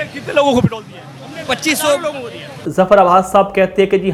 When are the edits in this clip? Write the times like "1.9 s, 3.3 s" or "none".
none